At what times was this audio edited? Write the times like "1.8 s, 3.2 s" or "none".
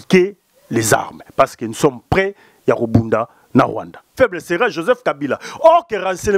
4.1 s